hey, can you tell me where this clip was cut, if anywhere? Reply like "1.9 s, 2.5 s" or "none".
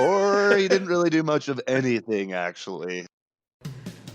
3.1 s